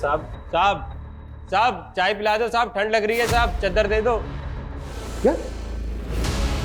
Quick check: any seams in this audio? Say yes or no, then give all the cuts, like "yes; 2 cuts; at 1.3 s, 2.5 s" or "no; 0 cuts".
yes; 1 cut; at 5.0 s